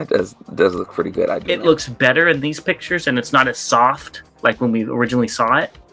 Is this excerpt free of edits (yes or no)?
no